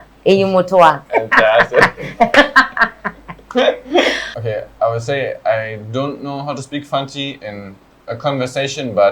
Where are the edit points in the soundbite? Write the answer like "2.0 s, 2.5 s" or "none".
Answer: 1.0 s, 4.3 s

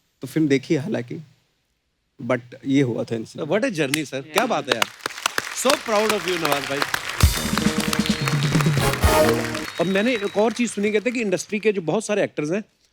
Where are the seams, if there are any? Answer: 9.6 s

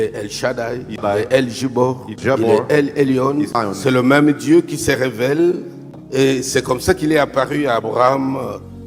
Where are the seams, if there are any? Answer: 1.0 s, 2.2 s, 3.5 s, 6.0 s

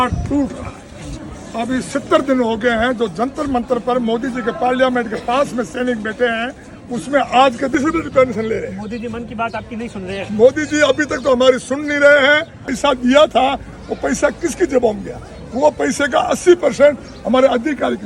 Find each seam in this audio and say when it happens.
7.6 s, 12.6 s

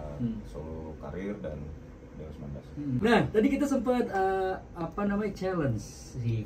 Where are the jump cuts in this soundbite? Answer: 2.9 s

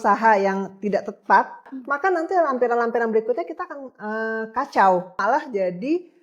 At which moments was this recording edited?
1.7 s, 5.2 s

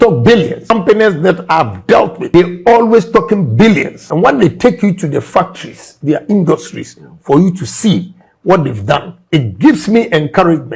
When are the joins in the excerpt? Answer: 0.7 s, 2.2 s, 4.0 s

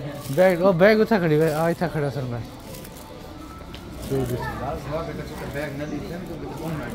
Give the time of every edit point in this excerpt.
none

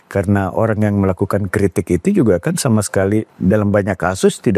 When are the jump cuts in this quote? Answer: 3.3 s

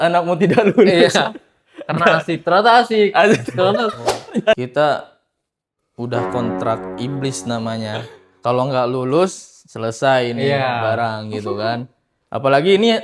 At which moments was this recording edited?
4.6 s

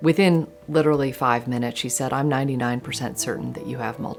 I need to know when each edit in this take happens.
none

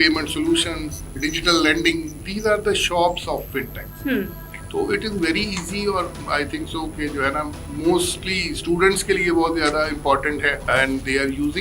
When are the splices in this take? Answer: 1.2 s, 4.6 s, 10.6 s

